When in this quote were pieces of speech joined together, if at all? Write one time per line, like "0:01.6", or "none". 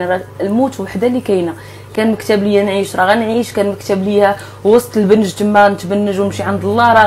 none